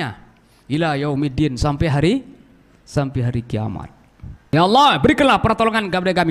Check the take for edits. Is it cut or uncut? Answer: cut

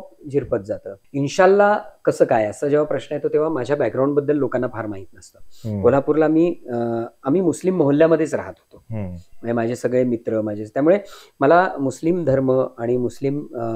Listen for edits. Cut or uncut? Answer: cut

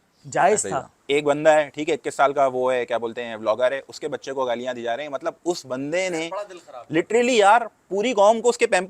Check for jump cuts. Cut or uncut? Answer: cut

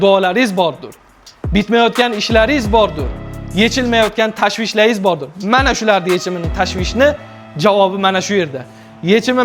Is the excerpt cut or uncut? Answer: uncut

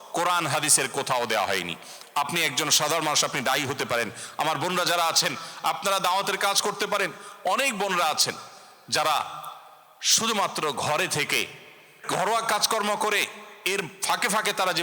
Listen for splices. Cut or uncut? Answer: cut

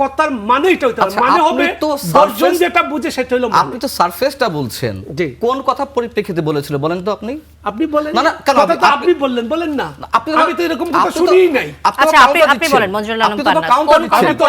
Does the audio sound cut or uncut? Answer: uncut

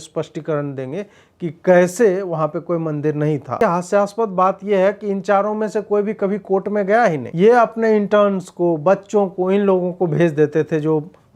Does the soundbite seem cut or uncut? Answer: cut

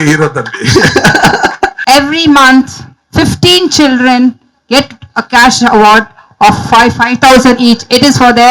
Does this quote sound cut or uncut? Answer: cut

